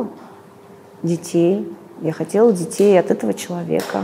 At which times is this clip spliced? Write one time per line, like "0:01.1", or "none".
none